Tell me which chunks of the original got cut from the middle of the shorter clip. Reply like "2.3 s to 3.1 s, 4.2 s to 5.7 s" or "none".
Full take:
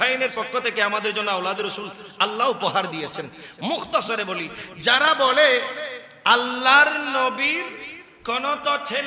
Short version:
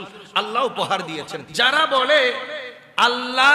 3.2 s to 4.7 s